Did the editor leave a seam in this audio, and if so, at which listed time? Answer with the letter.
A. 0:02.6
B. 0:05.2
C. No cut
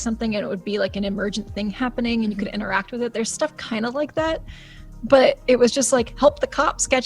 A